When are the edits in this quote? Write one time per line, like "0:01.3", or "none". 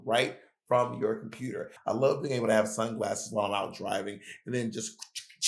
0:01.7